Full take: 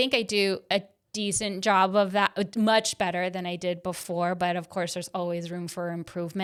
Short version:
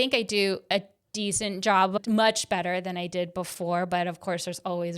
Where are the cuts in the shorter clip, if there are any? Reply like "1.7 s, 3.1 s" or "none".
2.0 s